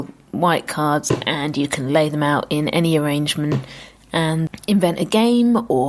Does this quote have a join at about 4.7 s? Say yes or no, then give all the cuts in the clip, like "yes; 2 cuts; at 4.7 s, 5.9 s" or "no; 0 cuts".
no; 1 cut; at 1.0 s